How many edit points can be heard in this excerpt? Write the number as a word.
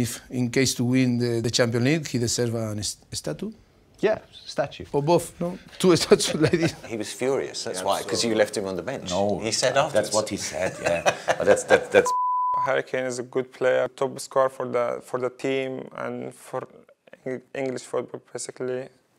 five